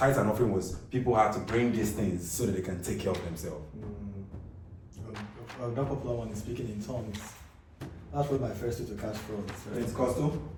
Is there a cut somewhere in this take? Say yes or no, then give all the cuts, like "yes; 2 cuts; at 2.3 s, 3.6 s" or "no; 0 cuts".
no; 0 cuts